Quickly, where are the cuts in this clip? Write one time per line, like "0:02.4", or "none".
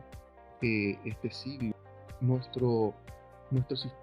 0:01.7